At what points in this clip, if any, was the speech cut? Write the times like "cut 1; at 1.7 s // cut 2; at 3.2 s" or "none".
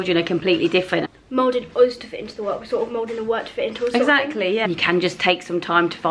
cut 1; at 1.0 s // cut 2; at 4.6 s